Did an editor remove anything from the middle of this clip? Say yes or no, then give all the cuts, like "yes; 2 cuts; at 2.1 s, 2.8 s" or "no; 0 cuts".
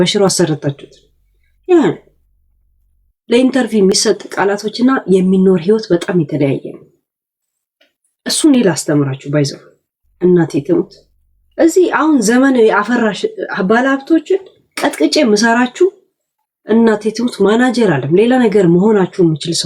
no; 0 cuts